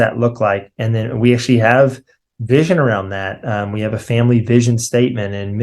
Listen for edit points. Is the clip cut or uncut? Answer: uncut